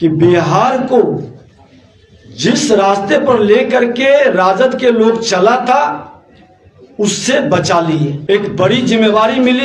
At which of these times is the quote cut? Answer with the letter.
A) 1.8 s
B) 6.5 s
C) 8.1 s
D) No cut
C